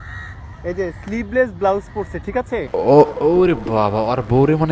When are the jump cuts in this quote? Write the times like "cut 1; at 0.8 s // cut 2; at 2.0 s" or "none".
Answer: cut 1; at 2.7 s

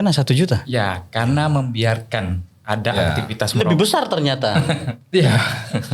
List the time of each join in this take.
none

